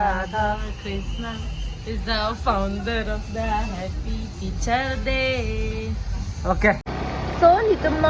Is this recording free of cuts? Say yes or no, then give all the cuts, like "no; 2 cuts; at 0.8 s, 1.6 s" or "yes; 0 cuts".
no; 1 cut; at 6.9 s